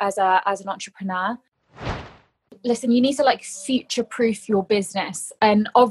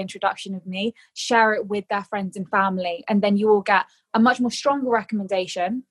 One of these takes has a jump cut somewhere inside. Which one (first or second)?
first